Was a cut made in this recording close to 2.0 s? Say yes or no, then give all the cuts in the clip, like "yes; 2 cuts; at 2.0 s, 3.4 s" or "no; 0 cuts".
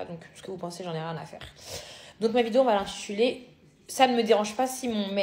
yes; 1 cut; at 2.0 s